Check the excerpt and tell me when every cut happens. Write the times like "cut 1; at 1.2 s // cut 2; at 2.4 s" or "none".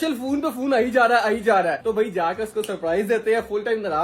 none

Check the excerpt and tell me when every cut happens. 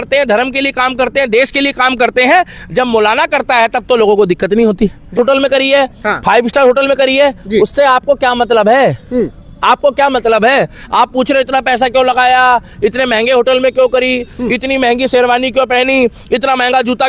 cut 1; at 5.2 s

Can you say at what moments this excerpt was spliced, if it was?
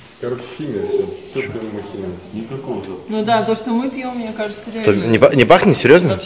none

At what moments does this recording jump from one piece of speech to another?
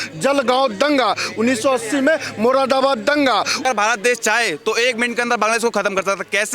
cut 1; at 3.6 s

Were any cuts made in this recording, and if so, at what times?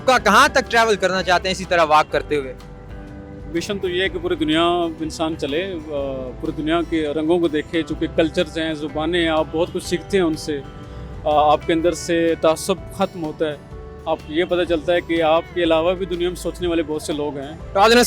none

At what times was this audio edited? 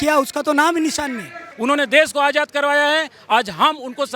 cut 1; at 1.4 s

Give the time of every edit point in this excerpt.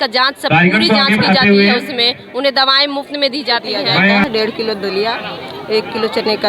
cut 1; at 4.2 s

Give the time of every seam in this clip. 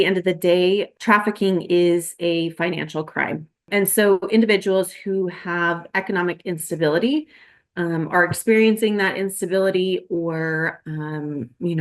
cut 1; at 0.9 s // cut 2; at 3.7 s

